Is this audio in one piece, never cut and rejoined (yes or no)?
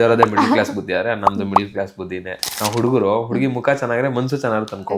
no